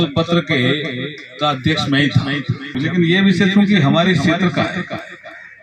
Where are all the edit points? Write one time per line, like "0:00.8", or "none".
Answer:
0:02.7